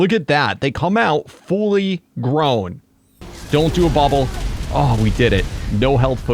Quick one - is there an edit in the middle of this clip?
yes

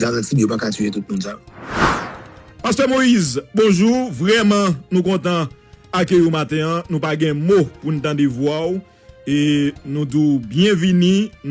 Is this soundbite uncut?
no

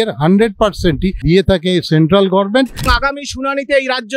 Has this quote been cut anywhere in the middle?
yes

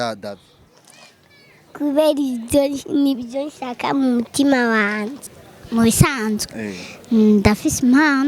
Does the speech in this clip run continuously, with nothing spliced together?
no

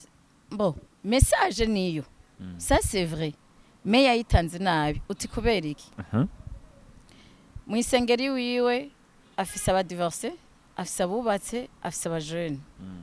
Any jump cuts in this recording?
no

